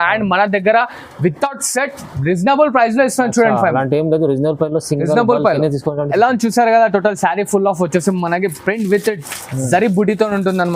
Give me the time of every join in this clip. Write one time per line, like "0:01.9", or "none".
none